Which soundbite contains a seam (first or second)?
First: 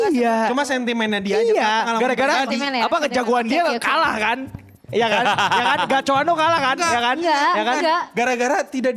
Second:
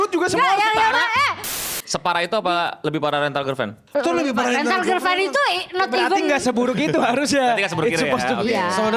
second